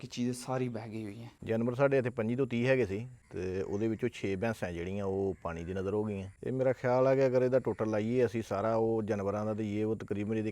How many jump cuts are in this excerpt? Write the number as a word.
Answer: two